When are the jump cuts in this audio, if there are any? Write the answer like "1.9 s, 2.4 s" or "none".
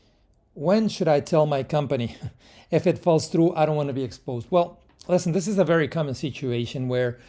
none

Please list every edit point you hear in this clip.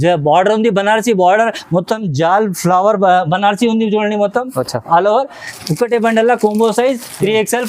none

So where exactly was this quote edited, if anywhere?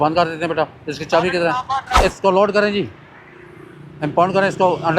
2.0 s

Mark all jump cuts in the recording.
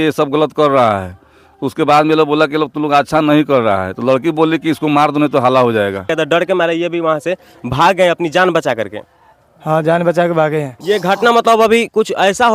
6.1 s, 10.7 s

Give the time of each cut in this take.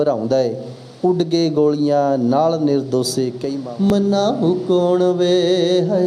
3.9 s

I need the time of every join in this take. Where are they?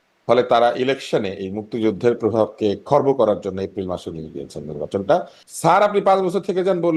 5.3 s

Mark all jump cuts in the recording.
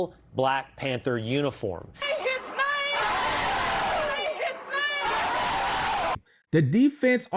2.1 s, 6.3 s

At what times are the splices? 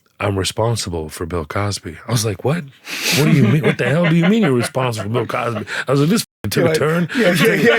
none

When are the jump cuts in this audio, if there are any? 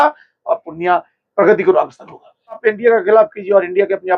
2.6 s

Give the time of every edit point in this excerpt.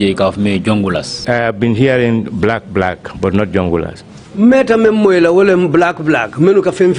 1.2 s

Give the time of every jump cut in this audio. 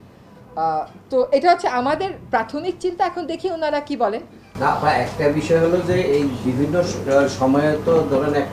none

